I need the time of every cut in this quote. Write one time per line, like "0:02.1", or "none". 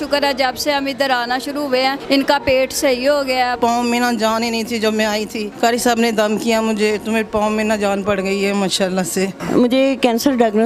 0:02.0
0:03.6
0:05.4
0:09.4